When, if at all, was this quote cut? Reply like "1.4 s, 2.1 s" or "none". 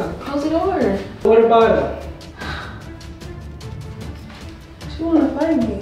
1.2 s